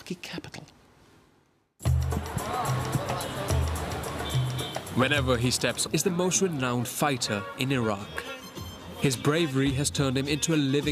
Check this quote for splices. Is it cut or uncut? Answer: uncut